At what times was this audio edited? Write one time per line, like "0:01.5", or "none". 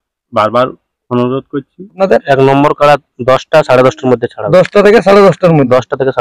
0:02.0